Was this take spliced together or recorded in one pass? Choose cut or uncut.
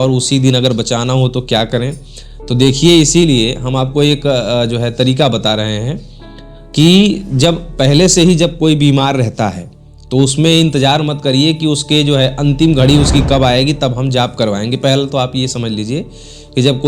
uncut